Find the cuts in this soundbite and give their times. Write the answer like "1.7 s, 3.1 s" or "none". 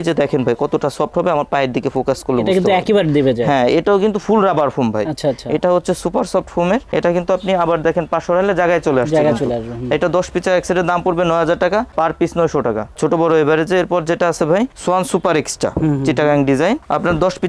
none